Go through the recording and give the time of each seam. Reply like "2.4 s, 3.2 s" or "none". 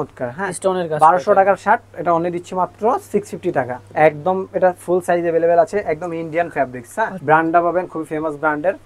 3.8 s, 7.2 s